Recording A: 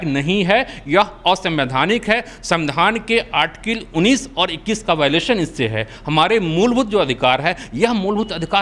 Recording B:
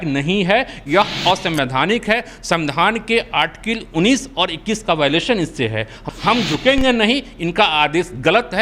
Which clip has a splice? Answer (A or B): B